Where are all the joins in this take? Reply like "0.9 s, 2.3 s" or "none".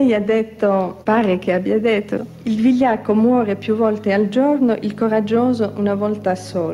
0.9 s, 2.3 s